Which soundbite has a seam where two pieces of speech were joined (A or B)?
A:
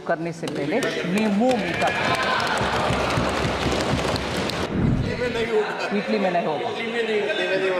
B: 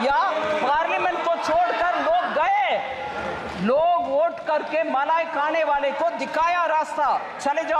A